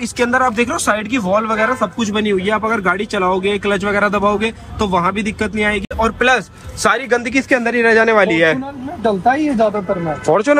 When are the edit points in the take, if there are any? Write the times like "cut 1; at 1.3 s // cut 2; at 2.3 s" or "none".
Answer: none